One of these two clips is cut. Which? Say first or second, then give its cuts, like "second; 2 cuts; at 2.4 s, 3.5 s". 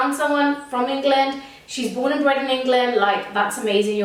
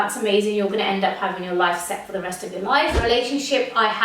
second; 1 cut; at 3.0 s